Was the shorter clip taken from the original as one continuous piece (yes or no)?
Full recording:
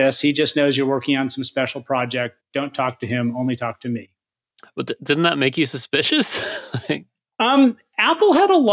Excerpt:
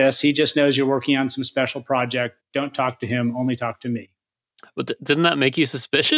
yes